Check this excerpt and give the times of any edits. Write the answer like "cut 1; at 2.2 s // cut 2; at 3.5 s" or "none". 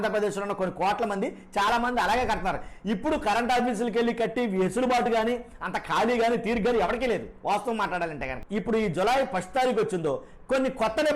cut 1; at 8.4 s